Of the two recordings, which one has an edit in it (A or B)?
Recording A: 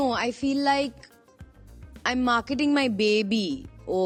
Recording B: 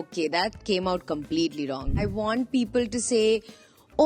B